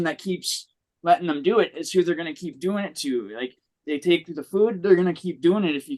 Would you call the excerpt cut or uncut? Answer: uncut